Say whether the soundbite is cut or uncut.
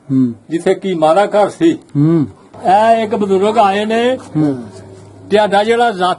cut